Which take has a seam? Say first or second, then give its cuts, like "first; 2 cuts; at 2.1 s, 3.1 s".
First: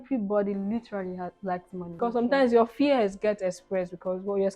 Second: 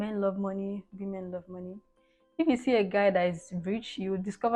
first; 1 cut; at 1.8 s